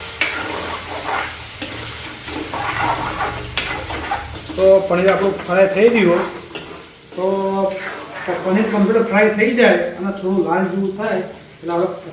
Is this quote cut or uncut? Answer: uncut